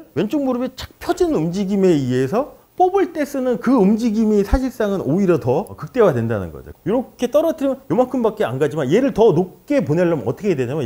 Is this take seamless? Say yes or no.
no